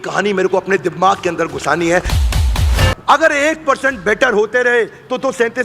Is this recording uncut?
no; 1 cut; at 2.4 s

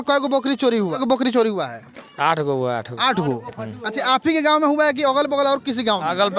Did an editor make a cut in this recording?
yes; 1 cut; at 1.0 s

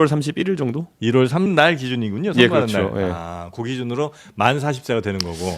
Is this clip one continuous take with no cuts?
no; 1 cut; at 1.5 s

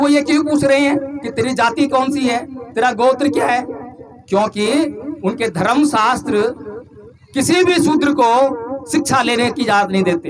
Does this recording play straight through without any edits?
yes; 0 cuts

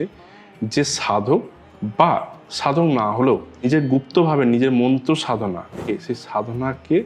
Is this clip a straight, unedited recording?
no; 2 cuts; at 3.7 s, 5.8 s

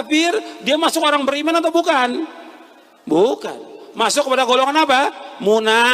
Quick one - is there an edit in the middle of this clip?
no; 0 cuts

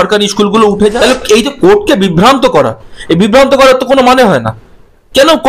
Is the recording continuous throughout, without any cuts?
no; 1 cut; at 0.9 s

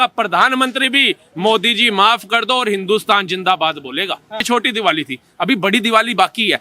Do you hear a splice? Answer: yes; 1 cut; at 4.4 s

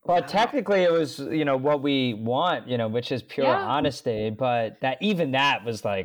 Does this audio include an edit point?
no; 0 cuts

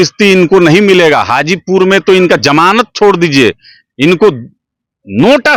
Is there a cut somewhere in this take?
no; 0 cuts

